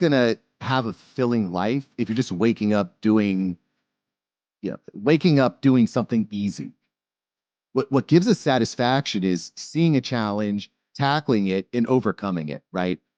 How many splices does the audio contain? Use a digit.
0